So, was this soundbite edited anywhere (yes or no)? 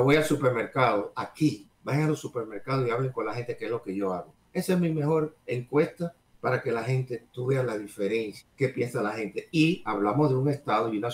yes